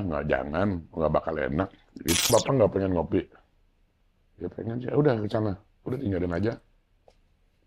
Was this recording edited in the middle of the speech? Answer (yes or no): yes